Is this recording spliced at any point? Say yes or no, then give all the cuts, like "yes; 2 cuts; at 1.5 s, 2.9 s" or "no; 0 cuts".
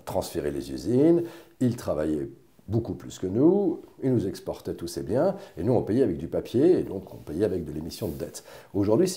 no; 0 cuts